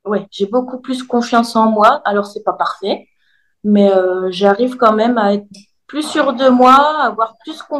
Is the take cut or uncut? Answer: uncut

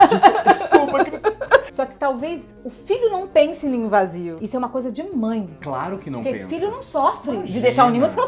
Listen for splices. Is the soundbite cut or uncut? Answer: cut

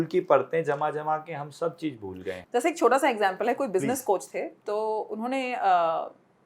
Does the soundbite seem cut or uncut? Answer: uncut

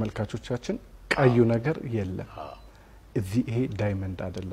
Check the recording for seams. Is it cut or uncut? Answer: uncut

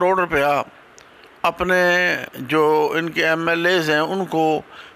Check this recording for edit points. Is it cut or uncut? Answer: uncut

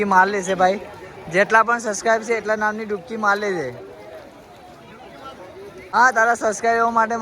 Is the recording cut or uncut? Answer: cut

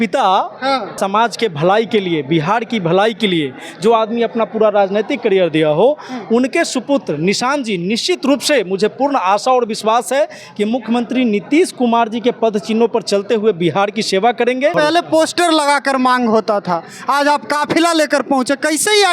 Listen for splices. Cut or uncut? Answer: cut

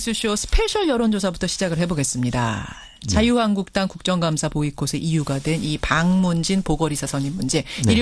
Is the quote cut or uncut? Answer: uncut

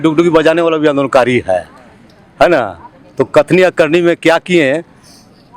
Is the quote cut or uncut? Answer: uncut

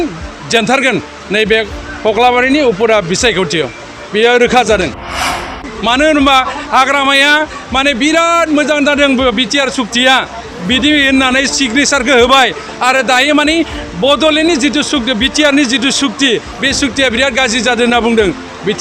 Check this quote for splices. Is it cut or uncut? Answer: cut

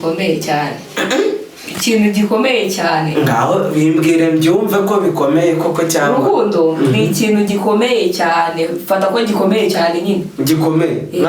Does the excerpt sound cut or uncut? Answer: uncut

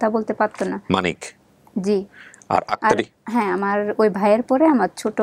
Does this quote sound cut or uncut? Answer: uncut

